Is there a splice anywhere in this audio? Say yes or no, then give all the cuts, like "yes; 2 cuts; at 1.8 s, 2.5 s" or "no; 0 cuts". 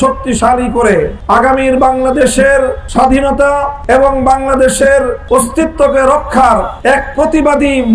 yes; 5 cuts; at 1.4 s, 2.8 s, 3.7 s, 5.2 s, 6.7 s